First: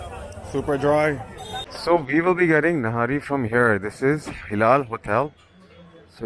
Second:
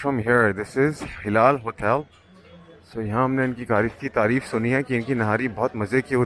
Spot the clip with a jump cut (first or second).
first